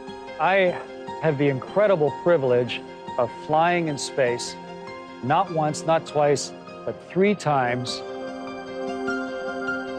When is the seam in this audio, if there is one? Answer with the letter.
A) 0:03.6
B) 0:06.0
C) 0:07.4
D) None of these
D